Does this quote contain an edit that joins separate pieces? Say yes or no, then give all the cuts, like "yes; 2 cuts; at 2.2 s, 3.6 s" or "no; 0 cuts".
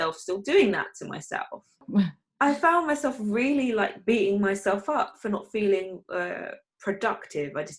yes; 1 cut; at 1.8 s